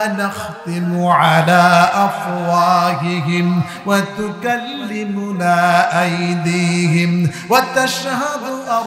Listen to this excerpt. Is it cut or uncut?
uncut